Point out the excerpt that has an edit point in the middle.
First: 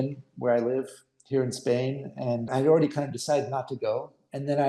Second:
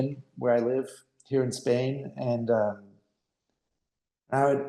first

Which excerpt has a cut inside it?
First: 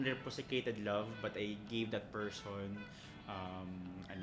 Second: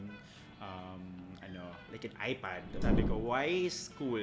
second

